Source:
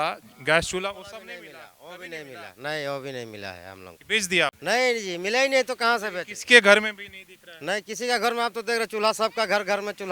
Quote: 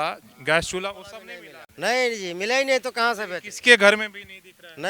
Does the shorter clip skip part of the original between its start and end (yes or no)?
yes